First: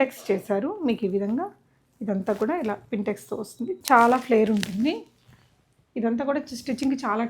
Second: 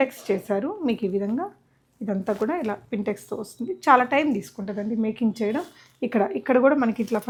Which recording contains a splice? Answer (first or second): first